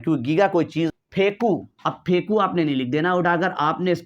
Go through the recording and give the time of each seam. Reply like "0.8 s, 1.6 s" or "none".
0.9 s

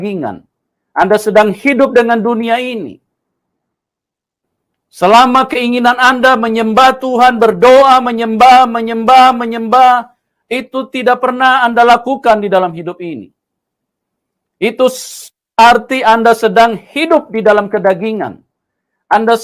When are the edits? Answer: none

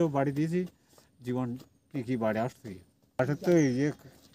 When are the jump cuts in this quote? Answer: 3.2 s

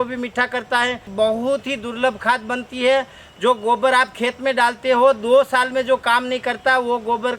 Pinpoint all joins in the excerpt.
1.1 s

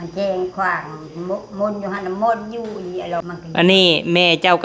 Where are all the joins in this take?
3.2 s

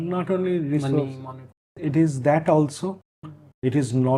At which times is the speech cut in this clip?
1.8 s

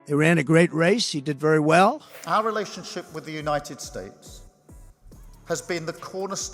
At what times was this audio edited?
2.1 s

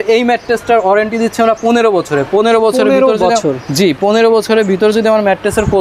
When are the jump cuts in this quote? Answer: none

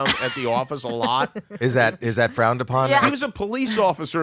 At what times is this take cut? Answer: 3.1 s

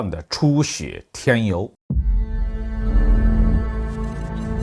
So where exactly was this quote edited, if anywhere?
1.8 s

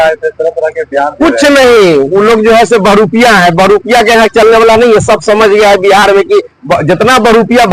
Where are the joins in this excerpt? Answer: none

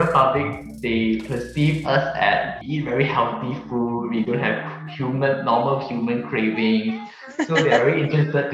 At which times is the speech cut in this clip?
2.6 s

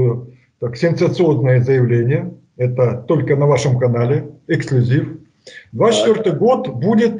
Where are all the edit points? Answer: none

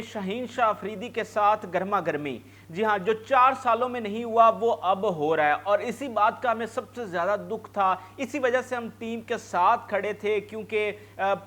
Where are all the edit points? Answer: none

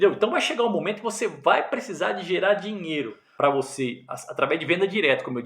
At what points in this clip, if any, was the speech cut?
none

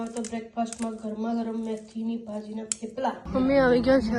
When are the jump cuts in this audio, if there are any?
3.2 s

